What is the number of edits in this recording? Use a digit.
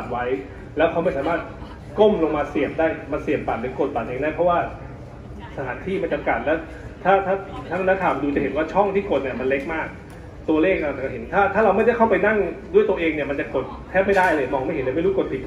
0